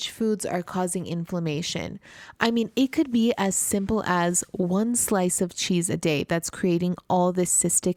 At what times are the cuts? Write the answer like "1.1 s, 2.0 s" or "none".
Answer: none

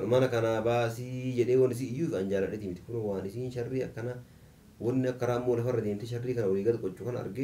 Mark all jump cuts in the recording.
none

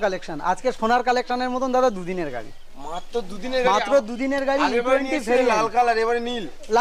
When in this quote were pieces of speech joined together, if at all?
none

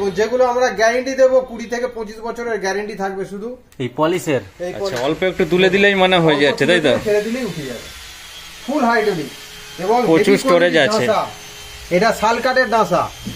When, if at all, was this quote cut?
4.8 s

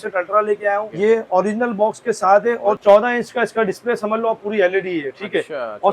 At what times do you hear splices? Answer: 0.9 s, 2.8 s

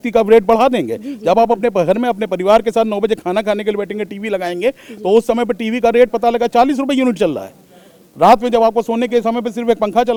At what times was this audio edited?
none

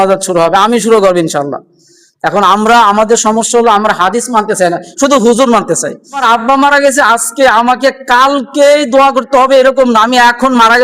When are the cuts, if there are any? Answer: 6.2 s

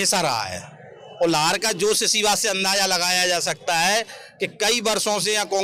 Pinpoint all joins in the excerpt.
none

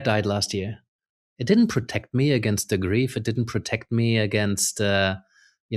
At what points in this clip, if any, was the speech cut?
1.2 s

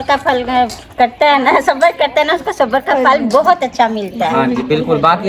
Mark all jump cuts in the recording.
none

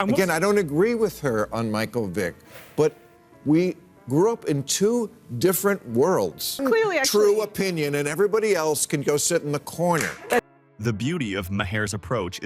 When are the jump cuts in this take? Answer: none

